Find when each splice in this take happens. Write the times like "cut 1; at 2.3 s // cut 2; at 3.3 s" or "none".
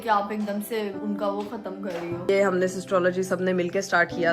cut 1; at 1.0 s // cut 2; at 2.3 s

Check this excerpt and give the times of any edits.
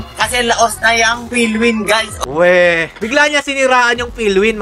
cut 1; at 2.2 s // cut 2; at 2.9 s

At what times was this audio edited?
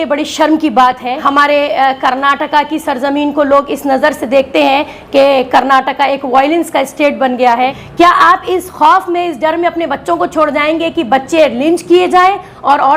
cut 1; at 1.2 s // cut 2; at 7.8 s

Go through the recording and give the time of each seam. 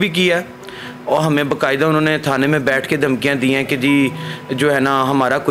none

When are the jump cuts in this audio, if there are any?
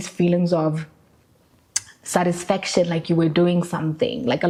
none

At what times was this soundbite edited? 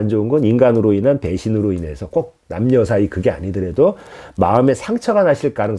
none

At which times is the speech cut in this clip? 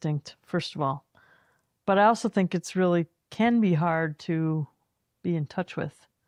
none

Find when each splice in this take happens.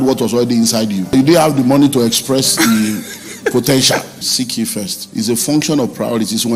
cut 1; at 1.1 s // cut 2; at 4.5 s

